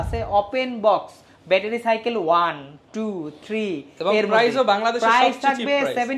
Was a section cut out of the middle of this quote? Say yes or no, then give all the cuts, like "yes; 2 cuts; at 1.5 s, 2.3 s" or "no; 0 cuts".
no; 0 cuts